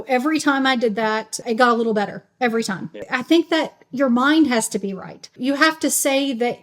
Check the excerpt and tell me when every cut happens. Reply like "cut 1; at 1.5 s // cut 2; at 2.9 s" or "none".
cut 1; at 1.4 s // cut 2; at 3.1 s // cut 3; at 5.4 s